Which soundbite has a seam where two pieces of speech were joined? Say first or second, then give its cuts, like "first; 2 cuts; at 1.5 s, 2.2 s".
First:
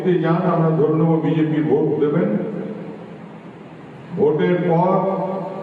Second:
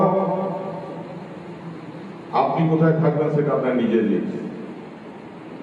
first; 1 cut; at 2.8 s